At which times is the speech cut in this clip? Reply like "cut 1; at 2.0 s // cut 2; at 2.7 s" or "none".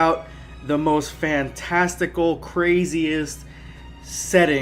cut 1; at 2.3 s